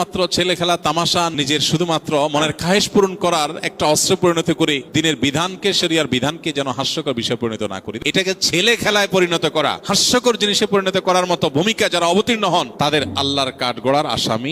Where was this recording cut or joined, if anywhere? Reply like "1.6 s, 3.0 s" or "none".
1.3 s, 4.8 s, 7.8 s, 9.8 s, 12.7 s